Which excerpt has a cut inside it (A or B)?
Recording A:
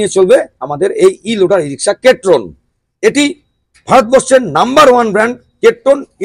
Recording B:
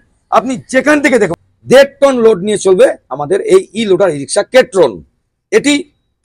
B